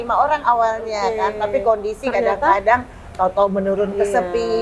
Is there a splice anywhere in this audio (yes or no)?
no